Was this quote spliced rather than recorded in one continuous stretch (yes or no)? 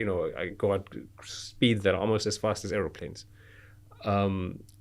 no